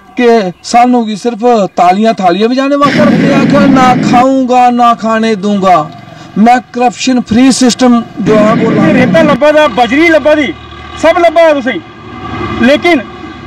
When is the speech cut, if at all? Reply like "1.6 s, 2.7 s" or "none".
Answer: 3.3 s, 8.7 s